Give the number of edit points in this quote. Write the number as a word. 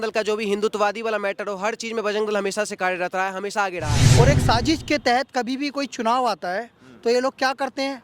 one